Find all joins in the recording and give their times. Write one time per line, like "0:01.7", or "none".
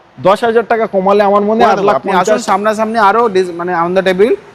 none